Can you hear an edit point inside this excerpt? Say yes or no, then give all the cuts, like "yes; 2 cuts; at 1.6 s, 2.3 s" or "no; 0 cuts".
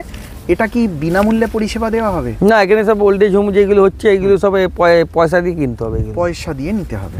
no; 0 cuts